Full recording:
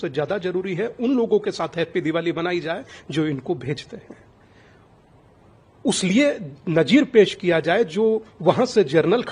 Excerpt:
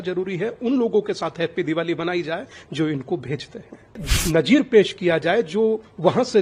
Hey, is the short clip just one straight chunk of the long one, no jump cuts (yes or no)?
no